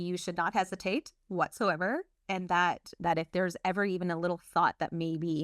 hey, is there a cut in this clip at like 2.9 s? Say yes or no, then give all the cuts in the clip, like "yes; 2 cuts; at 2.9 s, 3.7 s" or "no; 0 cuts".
yes; 1 cut; at 2.9 s